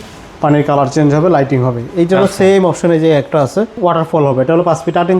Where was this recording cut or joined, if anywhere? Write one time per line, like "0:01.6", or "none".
0:03.7